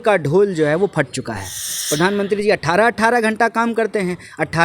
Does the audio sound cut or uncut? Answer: cut